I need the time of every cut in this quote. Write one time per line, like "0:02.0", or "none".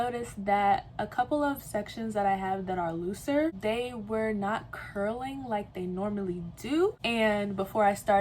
0:03.6
0:07.0